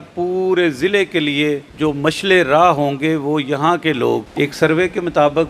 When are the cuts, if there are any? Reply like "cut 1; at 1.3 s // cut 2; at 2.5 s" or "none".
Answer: cut 1; at 1.7 s // cut 2; at 4.3 s

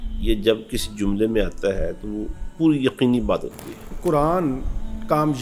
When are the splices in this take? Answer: cut 1; at 3.9 s

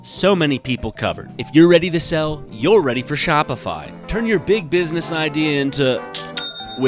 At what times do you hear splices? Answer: cut 1; at 1.3 s

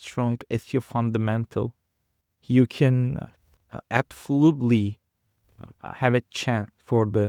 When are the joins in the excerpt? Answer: none

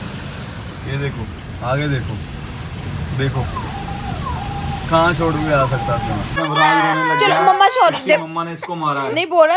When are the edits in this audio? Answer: cut 1; at 6.4 s

